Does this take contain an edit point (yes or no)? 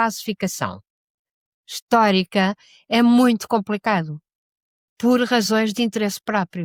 no